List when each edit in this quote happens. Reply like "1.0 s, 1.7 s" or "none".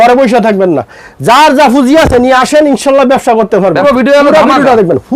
3.8 s